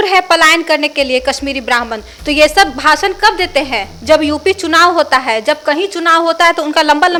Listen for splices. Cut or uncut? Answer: uncut